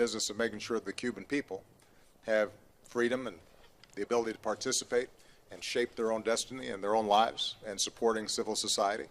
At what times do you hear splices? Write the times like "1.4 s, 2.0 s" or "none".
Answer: none